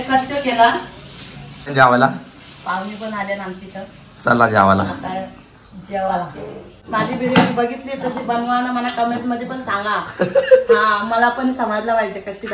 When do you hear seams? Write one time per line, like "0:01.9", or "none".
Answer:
0:01.7
0:06.8